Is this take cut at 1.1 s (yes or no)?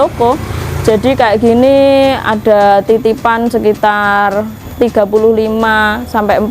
no